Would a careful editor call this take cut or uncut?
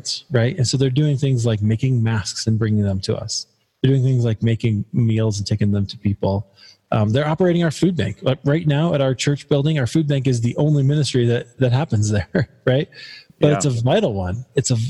uncut